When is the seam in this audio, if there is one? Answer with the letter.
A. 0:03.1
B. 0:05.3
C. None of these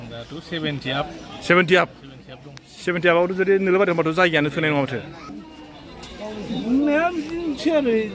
B